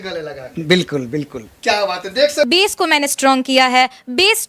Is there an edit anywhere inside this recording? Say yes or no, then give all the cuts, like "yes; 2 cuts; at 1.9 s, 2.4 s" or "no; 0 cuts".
yes; 1 cut; at 2.5 s